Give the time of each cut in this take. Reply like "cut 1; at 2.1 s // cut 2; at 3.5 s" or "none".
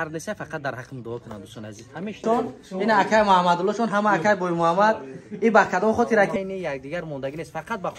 cut 1; at 2.2 s // cut 2; at 6.3 s